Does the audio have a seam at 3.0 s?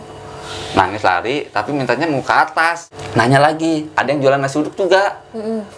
yes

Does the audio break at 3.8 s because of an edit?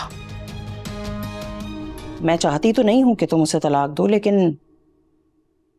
no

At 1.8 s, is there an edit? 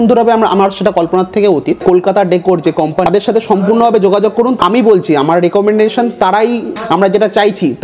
yes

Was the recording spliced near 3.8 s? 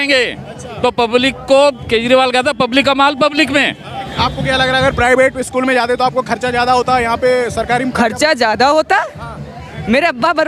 yes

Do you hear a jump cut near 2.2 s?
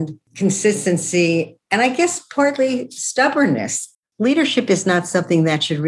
no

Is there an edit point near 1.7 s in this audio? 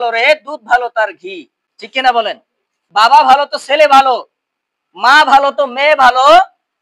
no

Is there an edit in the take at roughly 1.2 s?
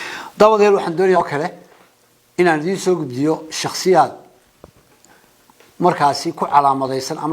yes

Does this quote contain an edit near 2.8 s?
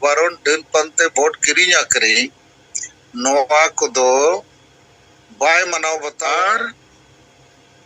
no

